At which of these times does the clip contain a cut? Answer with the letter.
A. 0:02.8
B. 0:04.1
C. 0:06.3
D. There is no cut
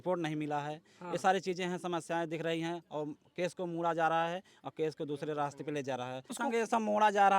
C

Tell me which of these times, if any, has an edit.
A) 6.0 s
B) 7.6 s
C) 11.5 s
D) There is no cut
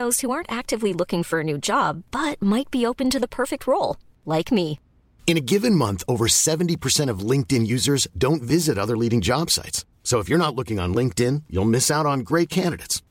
D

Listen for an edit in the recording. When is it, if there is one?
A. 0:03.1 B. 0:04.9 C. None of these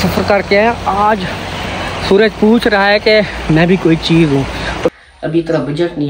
B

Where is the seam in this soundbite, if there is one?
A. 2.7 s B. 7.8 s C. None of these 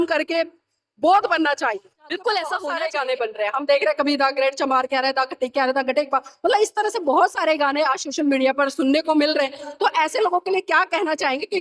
A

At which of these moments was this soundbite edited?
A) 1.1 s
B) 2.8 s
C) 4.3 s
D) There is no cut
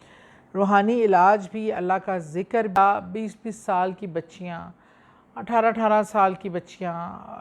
B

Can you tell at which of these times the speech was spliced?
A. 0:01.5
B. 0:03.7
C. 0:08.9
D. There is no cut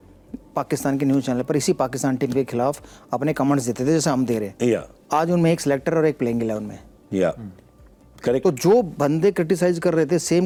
D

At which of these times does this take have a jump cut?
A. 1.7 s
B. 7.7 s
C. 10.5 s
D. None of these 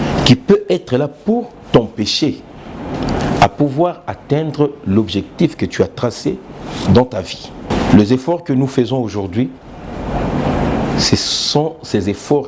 B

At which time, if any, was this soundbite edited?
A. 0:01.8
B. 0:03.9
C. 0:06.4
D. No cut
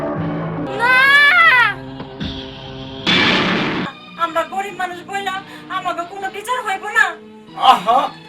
B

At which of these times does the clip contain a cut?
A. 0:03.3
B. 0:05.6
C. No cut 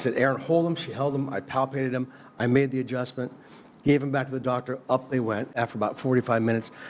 B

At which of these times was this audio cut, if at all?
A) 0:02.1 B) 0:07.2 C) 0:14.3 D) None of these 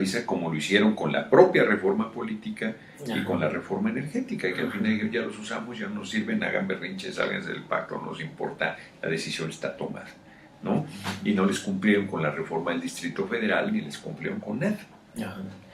D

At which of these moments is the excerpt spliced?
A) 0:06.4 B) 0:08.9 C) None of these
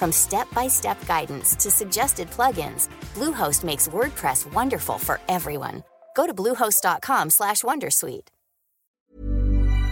B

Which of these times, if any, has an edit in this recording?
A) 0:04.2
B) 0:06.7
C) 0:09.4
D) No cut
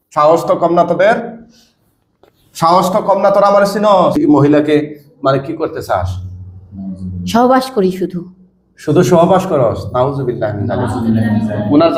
A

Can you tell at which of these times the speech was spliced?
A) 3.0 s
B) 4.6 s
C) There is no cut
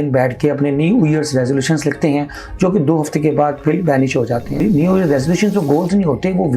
B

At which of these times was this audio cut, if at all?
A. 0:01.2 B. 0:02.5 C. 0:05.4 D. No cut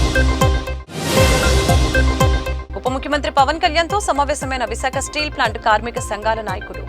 B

